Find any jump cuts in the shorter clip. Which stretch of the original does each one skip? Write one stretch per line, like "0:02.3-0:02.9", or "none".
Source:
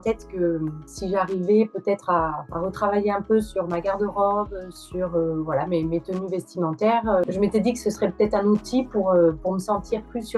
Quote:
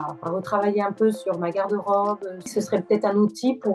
0:04.8-0:07.8